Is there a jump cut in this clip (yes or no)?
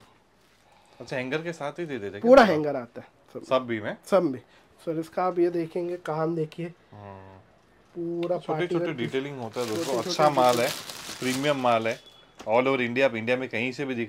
no